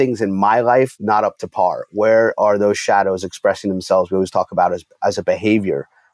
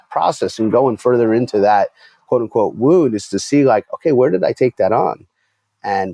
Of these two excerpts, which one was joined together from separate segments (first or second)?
first